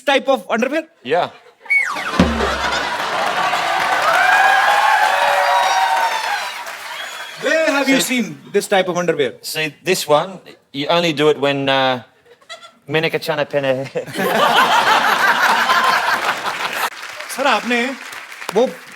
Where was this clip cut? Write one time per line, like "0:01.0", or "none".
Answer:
0:16.9